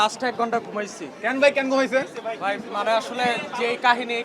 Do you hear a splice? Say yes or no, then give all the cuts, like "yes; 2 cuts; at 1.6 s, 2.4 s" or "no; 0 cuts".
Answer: no; 0 cuts